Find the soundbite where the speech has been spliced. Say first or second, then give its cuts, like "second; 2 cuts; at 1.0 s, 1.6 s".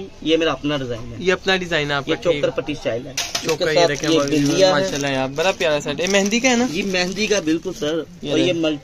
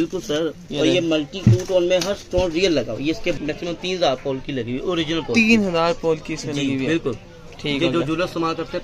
second; 1 cut; at 3.3 s